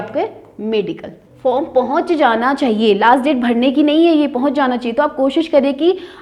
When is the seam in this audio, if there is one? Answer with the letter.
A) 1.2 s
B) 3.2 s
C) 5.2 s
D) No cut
A